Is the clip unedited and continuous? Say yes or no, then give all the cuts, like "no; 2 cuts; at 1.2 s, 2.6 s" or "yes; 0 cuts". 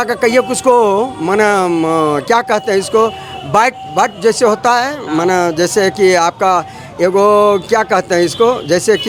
yes; 0 cuts